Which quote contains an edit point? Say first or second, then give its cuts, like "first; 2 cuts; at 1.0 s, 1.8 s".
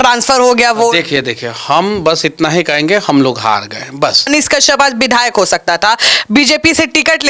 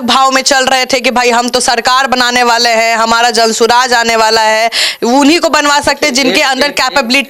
first; 1 cut; at 4.3 s